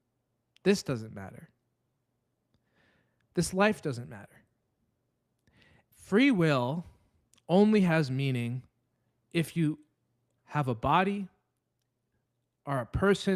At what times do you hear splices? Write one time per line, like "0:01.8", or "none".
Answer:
0:05.9
0:10.3